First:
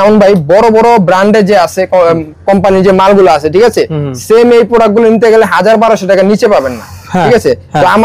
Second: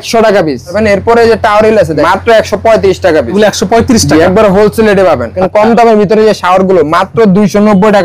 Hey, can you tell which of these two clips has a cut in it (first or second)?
second